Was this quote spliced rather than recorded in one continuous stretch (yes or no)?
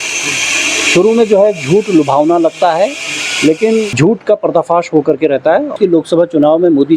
yes